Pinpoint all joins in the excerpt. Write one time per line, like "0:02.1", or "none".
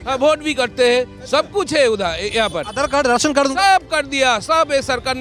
none